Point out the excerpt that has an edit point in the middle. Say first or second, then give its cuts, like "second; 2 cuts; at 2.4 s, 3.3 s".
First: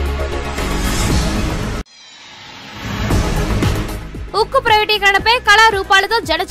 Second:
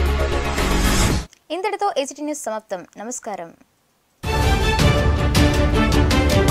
first; 2 cuts; at 1.1 s, 3.8 s